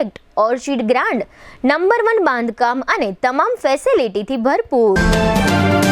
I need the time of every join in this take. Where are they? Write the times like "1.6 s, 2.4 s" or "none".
5.0 s